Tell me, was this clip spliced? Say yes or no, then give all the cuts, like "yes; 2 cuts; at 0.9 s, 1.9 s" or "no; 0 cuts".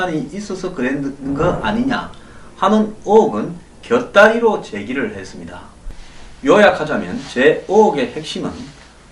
no; 0 cuts